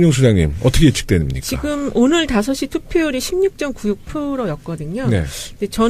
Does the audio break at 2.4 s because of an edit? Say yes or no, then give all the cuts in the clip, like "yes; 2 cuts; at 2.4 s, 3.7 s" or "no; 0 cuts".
yes; 1 cut; at 2.4 s